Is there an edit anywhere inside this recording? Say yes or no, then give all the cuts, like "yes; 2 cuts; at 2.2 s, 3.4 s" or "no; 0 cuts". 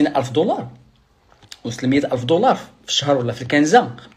no; 0 cuts